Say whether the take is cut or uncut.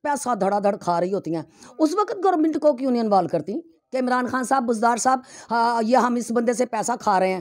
uncut